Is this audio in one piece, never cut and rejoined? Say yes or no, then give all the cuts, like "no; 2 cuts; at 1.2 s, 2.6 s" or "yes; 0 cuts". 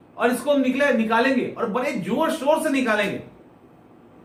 yes; 0 cuts